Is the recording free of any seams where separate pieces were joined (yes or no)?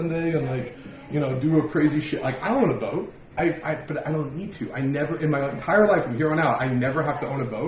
no